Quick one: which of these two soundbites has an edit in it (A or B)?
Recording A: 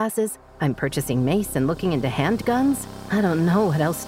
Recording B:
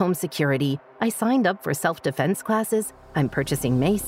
A